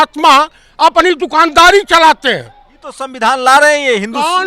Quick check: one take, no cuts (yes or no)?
no